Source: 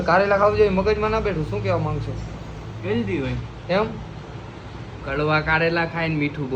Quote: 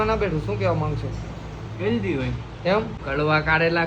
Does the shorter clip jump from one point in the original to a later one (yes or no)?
yes